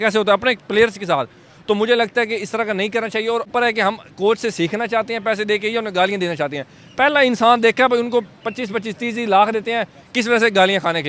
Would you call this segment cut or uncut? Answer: cut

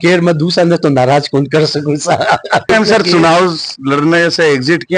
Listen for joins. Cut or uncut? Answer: cut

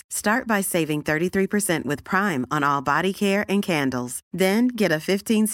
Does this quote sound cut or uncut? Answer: uncut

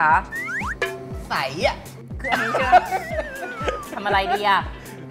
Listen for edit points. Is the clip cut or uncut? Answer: uncut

